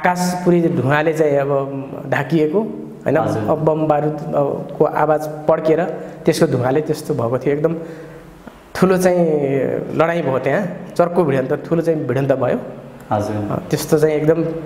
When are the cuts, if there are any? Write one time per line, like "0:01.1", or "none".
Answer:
none

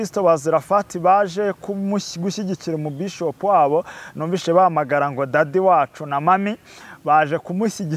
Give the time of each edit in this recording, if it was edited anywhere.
none

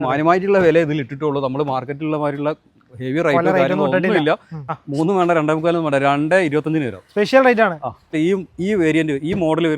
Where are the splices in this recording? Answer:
0:04.6
0:08.1

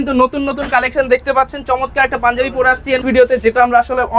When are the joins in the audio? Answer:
0:03.0

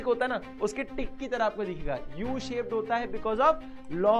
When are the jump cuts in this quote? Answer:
none

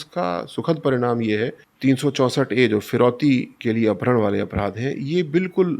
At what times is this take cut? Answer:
0:01.6

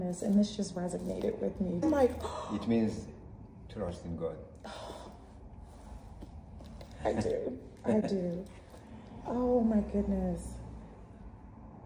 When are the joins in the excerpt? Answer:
none

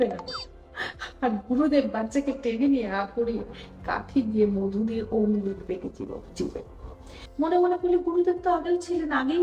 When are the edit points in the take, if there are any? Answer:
0:07.2

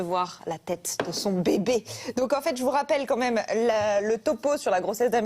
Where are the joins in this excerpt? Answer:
none

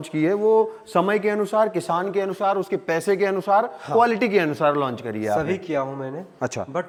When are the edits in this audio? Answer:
none

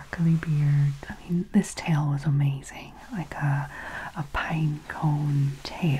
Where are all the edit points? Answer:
0:01.1

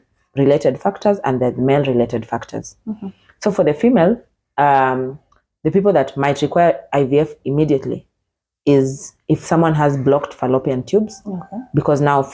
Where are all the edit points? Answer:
none

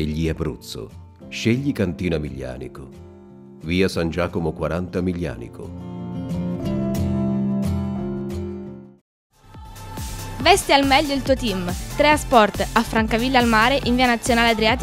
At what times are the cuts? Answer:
0:08.9

